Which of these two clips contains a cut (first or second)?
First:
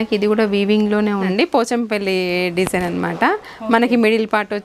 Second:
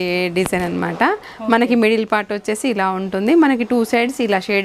first